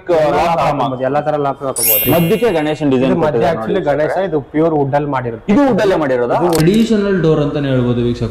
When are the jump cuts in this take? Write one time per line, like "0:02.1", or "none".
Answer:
0:02.0
0:06.6